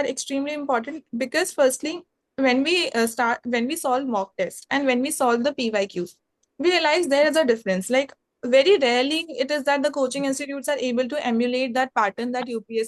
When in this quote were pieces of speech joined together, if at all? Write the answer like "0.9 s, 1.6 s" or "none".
none